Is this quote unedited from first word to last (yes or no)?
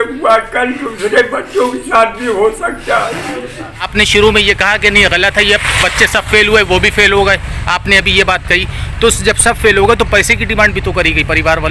no